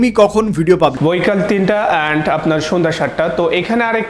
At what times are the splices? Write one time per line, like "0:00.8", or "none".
0:01.0